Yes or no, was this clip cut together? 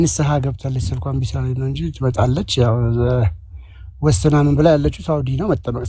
no